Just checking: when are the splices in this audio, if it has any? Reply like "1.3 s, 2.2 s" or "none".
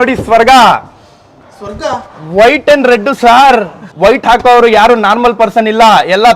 3.8 s